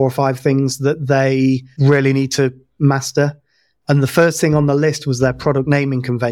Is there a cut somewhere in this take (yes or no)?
yes